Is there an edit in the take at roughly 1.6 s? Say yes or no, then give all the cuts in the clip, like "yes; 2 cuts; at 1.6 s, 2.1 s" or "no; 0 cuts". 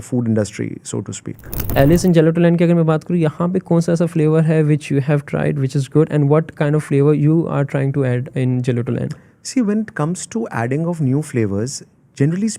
yes; 1 cut; at 1.6 s